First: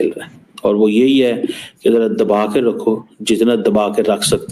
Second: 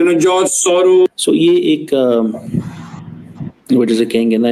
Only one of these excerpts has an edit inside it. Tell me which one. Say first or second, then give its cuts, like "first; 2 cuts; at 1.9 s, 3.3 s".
second; 1 cut; at 1.1 s